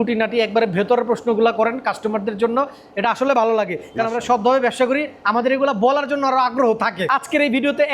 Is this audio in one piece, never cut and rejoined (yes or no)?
no